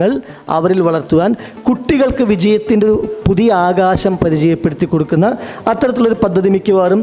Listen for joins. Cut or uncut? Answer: uncut